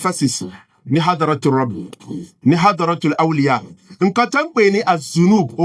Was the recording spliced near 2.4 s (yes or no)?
no